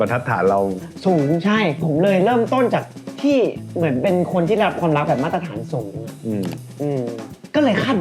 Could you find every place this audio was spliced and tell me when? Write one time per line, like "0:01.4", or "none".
0:01.8